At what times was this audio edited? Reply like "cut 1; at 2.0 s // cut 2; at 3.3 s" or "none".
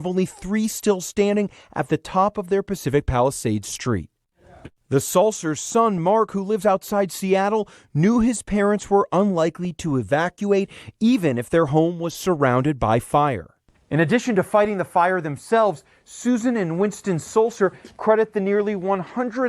cut 1; at 4.6 s